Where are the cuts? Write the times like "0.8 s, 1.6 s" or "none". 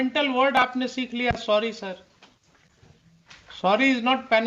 none